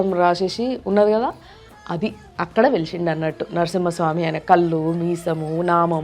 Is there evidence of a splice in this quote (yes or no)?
no